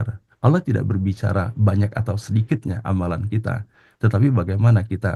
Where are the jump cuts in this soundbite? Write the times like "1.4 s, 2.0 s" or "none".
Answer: none